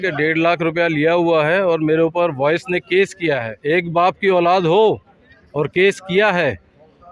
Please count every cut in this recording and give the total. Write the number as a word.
one